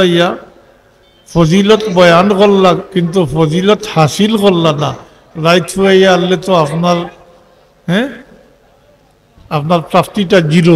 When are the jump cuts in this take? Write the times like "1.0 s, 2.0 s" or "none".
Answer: none